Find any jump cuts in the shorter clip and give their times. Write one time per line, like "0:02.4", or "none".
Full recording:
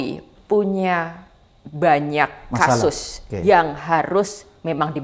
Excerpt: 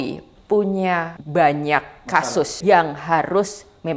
0:01.1
0:02.5